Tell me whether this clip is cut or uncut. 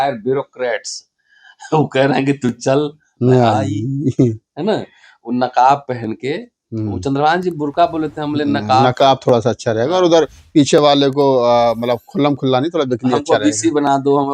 uncut